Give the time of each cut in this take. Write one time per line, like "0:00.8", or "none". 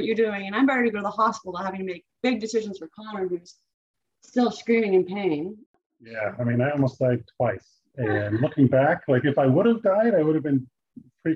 0:05.8